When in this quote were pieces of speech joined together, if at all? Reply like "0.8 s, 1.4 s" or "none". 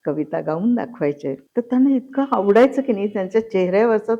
1.4 s